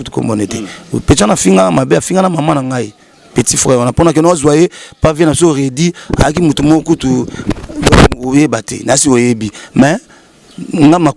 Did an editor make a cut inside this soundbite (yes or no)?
no